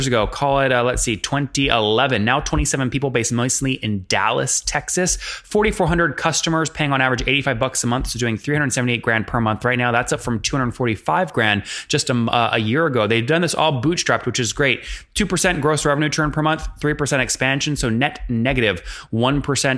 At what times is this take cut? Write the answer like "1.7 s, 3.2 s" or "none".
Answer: none